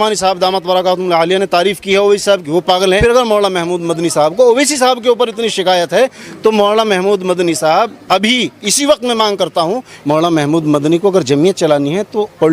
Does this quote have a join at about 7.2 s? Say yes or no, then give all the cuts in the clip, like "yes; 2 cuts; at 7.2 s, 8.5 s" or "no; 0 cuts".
no; 2 cuts; at 3.0 s, 9.9 s